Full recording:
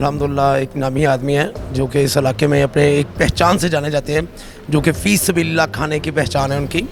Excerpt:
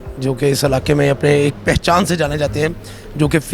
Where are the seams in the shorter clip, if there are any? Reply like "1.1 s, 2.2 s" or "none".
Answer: none